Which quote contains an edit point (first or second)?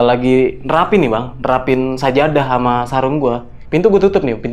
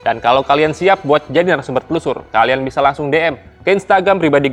first